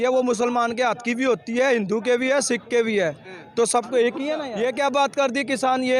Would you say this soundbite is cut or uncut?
cut